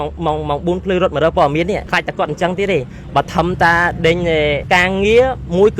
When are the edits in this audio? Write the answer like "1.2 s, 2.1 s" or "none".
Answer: 1.9 s, 4.6 s